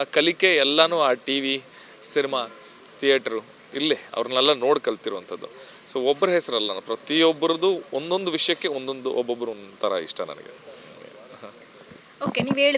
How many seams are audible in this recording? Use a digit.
0